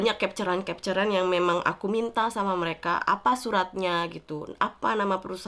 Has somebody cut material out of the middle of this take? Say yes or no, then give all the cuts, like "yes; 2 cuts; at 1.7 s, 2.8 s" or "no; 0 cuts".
no; 0 cuts